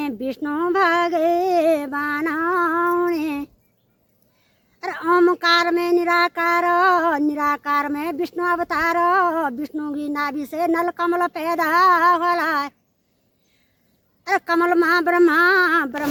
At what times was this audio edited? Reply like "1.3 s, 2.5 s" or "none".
none